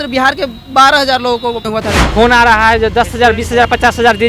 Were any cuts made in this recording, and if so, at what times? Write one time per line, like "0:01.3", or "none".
0:01.7